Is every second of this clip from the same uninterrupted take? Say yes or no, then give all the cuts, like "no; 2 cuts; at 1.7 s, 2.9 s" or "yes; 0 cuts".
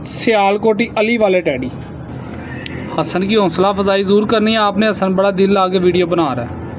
no; 1 cut; at 2.2 s